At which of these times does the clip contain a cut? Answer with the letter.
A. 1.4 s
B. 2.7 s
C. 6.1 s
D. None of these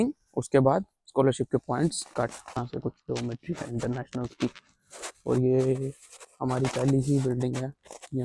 D